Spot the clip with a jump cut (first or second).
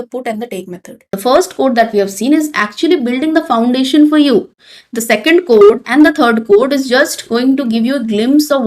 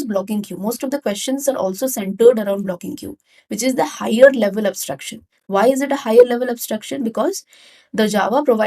first